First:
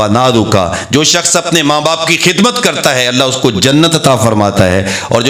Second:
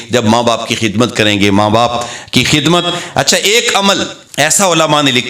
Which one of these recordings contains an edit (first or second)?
second